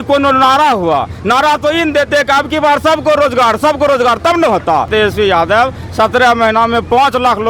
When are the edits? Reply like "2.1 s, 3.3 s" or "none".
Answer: 4.9 s